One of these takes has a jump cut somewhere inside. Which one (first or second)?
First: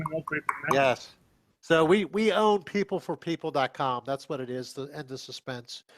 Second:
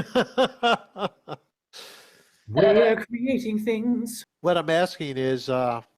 second